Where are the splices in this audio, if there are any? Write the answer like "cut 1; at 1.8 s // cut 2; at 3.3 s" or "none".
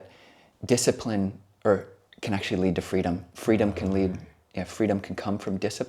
none